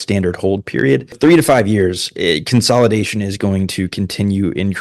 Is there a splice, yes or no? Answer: yes